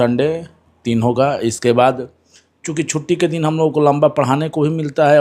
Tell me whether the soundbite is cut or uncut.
uncut